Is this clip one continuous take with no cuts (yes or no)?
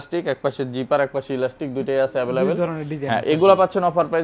yes